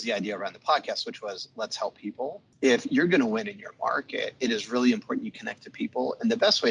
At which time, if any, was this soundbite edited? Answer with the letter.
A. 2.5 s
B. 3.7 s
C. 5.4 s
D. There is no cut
A